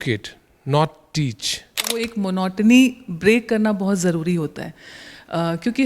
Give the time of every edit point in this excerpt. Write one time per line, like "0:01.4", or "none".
0:02.1

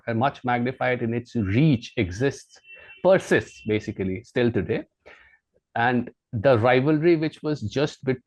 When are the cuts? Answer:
none

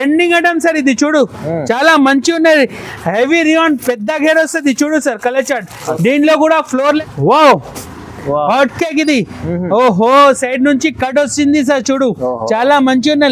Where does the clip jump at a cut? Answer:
0:07.0

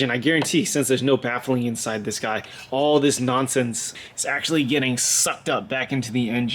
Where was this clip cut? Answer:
0:03.9

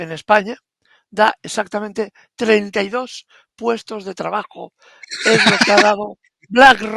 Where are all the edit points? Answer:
none

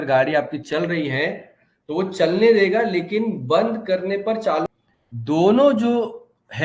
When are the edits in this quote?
0:04.7

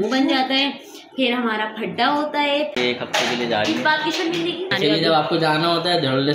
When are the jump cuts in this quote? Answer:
0:02.7
0:04.7

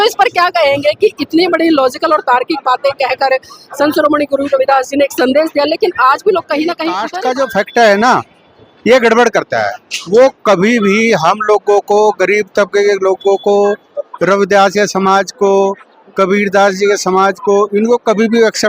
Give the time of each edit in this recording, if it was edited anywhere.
0:07.1

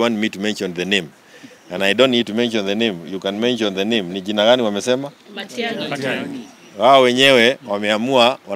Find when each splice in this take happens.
none

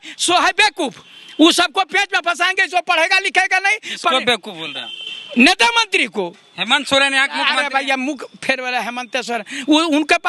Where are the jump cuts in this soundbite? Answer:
none

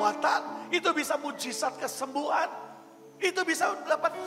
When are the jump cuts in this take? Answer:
none

